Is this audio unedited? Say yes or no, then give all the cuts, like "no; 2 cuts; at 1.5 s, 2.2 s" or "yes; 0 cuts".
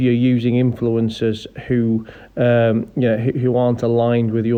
yes; 0 cuts